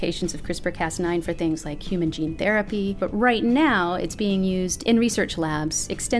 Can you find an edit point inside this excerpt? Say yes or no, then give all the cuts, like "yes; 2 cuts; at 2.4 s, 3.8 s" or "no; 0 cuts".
yes; 1 cut; at 3.0 s